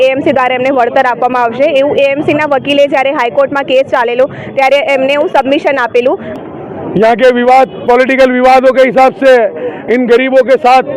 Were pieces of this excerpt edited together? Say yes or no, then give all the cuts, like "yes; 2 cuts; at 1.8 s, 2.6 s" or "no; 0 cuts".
yes; 1 cut; at 6.3 s